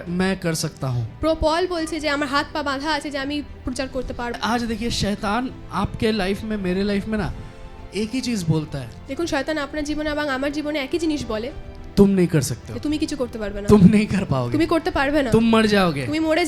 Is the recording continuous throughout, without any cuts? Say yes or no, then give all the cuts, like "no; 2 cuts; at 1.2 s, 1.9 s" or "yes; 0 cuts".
no; 1 cut; at 4.4 s